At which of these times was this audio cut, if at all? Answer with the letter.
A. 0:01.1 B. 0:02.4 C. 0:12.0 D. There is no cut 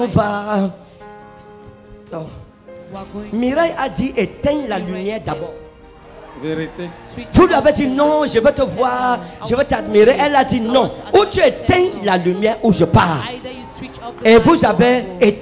D